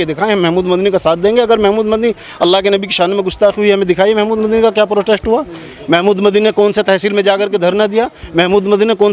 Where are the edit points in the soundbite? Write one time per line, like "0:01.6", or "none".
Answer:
none